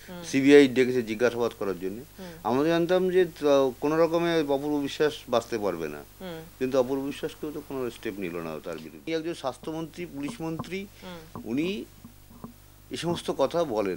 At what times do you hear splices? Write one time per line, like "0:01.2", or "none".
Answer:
0:09.1